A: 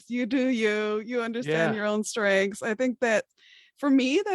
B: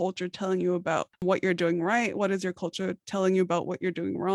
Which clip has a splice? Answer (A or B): B